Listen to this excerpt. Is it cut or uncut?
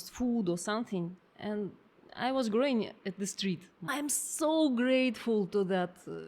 cut